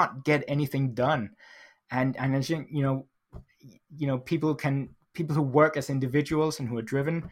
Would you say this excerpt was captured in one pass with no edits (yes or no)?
yes